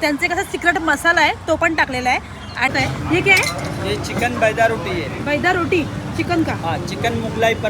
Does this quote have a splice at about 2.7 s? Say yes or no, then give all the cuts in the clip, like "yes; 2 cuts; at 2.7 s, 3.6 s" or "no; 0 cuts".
yes; 1 cut; at 2.7 s